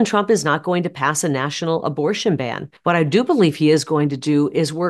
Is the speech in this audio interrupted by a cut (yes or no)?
yes